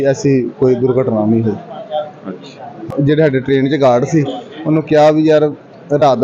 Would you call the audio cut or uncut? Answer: cut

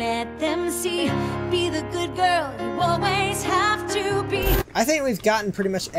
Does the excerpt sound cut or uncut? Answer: cut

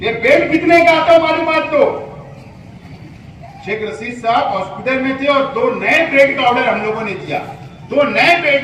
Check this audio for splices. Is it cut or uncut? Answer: uncut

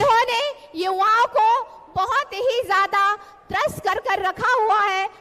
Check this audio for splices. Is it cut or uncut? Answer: uncut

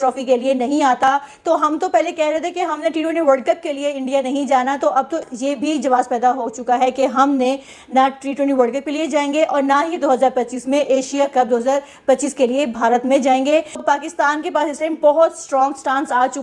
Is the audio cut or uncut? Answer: uncut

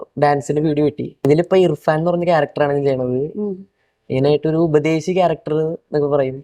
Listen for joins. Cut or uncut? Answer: cut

